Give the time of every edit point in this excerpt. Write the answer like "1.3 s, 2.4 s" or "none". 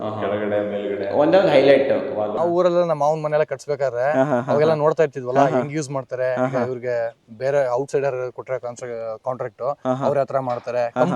2.3 s